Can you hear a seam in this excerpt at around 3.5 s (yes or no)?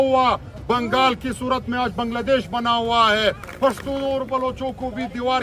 yes